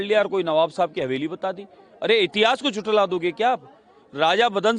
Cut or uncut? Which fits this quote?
uncut